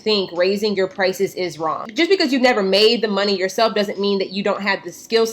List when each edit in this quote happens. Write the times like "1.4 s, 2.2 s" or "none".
1.9 s